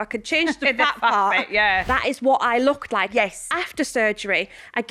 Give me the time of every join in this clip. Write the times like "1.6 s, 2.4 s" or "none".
1.8 s